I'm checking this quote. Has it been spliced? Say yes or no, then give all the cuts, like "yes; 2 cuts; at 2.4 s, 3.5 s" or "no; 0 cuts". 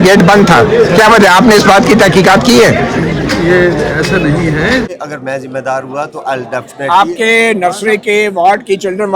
yes; 1 cut; at 4.9 s